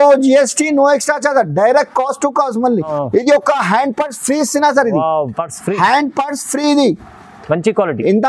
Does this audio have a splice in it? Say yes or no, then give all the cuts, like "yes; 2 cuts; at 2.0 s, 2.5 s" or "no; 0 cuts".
yes; 1 cut; at 2.9 s